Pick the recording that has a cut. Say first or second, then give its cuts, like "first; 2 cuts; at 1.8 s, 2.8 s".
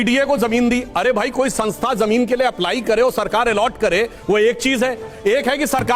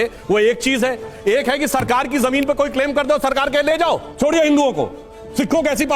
second; 1 cut; at 4.1 s